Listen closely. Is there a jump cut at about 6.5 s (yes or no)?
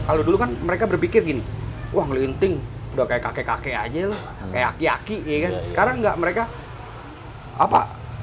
no